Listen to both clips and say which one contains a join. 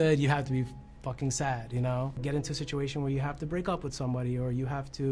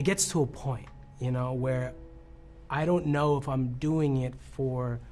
first; 1 cut; at 2.2 s

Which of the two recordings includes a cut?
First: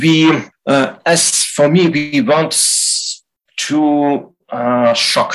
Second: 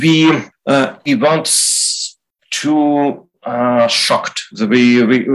second; 1 cut; at 1.0 s

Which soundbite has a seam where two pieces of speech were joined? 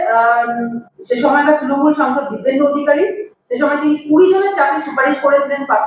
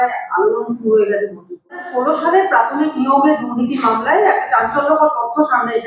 second; 1 cut; at 1.8 s

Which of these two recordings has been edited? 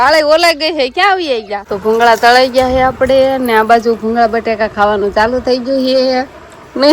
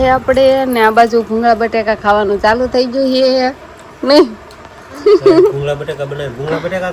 first; 1 cut; at 1.6 s

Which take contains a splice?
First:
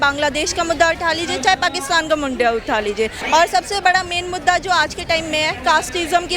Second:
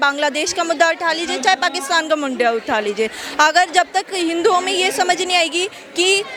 first; 1 cut; at 3.2 s

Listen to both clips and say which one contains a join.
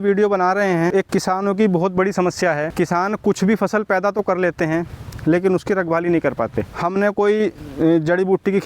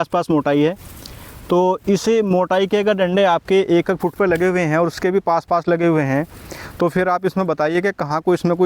first; 3 cuts; at 0.9 s, 2.7 s, 6.7 s

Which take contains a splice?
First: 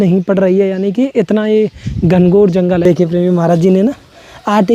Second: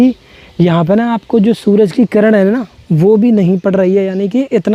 first; 1 cut; at 2.8 s

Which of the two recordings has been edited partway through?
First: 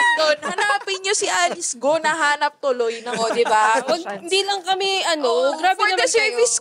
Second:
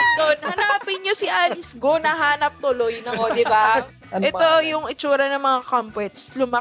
second; 1 cut; at 3.8 s

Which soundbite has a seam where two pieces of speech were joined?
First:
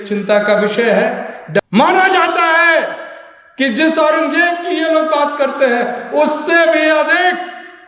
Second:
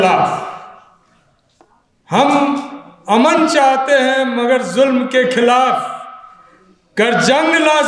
first; 1 cut; at 1.6 s

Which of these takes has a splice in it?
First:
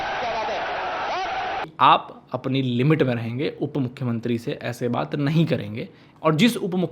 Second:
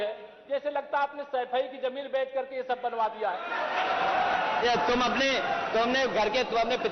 first; 2 cuts; at 1.7 s, 6.0 s

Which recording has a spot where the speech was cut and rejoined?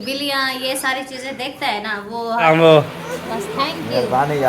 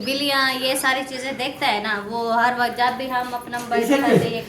first; 1 cut; at 2.5 s

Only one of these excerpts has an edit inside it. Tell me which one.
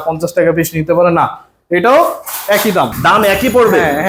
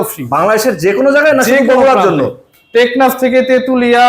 first; 1 cut; at 2.9 s

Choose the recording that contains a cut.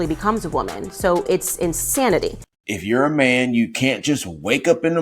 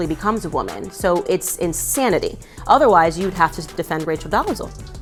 first; 1 cut; at 2.5 s

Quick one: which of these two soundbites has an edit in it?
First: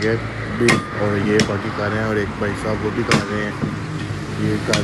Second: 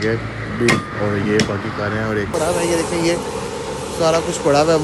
second; 1 cut; at 2.3 s

